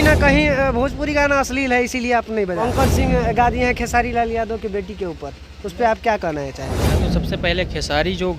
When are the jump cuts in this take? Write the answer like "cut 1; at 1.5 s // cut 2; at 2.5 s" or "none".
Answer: cut 1; at 2.6 s // cut 2; at 6.8 s